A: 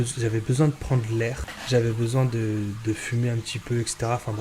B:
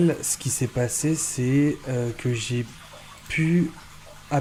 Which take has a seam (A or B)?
A